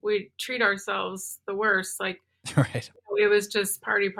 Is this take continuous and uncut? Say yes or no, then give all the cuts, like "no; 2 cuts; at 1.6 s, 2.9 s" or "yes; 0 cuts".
no; 1 cut; at 2.9 s